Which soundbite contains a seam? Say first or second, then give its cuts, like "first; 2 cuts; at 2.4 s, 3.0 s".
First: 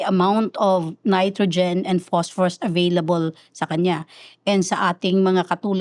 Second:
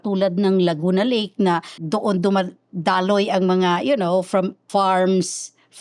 second; 2 cuts; at 1.7 s, 4.6 s